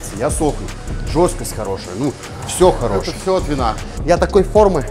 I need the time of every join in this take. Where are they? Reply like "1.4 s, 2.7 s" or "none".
4.0 s

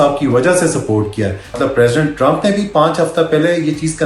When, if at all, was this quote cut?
1.6 s

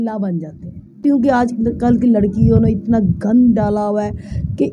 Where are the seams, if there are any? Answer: 1.0 s

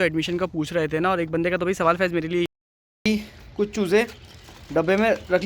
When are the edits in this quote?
3.0 s

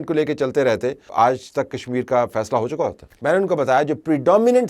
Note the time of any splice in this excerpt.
1.0 s, 3.1 s

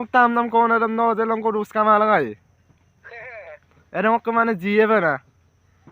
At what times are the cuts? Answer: 2.5 s

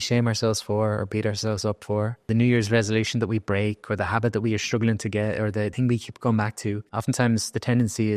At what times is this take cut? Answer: 2.3 s, 5.7 s, 6.9 s

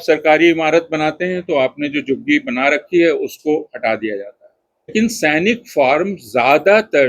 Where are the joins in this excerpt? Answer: 4.9 s

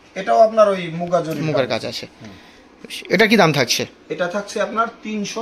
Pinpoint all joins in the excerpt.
none

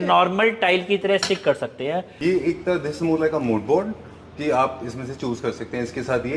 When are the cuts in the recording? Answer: 2.1 s

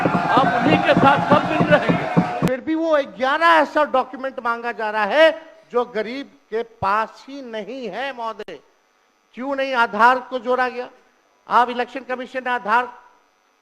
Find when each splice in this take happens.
2.5 s

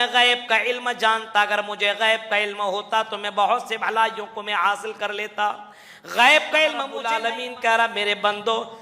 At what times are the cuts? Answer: 7.1 s

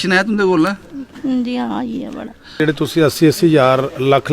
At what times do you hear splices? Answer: 2.6 s

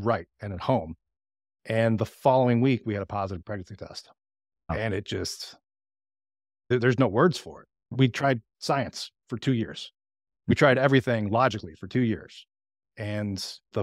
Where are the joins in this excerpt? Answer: 4.7 s

